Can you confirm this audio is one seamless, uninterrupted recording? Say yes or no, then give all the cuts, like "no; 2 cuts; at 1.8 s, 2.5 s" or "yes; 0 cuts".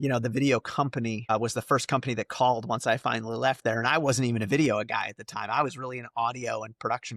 no; 1 cut; at 1.3 s